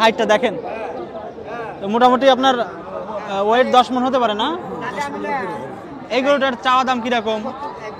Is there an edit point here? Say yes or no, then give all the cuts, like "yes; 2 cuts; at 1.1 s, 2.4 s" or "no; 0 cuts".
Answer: no; 0 cuts